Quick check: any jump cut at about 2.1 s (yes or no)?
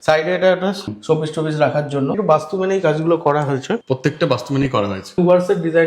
yes